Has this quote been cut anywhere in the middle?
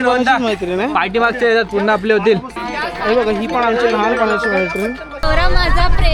yes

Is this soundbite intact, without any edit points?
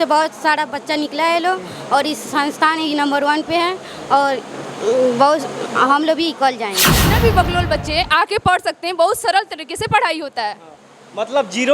no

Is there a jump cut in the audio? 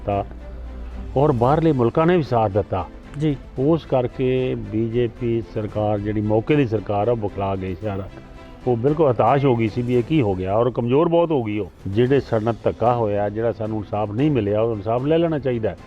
yes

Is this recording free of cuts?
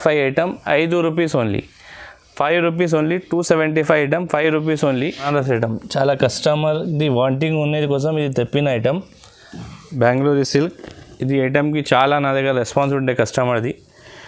no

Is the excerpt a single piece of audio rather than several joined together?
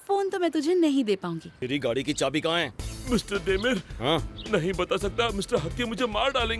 no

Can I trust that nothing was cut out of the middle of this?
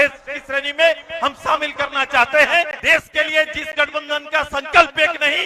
no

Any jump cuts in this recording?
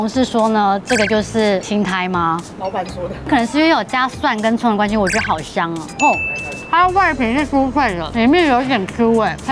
no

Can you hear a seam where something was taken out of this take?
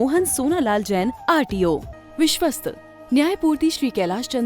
yes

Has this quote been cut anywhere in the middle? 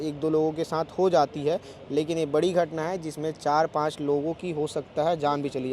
no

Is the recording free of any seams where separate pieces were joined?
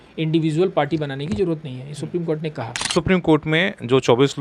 no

